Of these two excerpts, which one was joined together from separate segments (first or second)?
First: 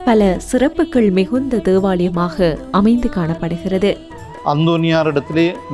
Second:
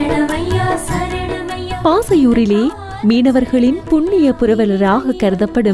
first